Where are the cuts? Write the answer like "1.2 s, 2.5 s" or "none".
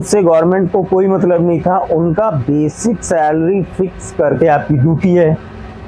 4.3 s